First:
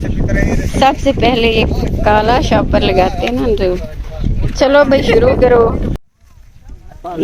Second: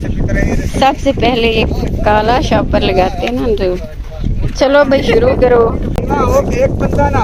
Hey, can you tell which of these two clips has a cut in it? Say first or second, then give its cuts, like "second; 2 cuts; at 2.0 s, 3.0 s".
first; 1 cut; at 6.0 s